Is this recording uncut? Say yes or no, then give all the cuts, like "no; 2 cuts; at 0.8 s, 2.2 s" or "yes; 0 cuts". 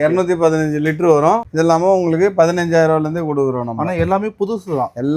no; 1 cut; at 1.5 s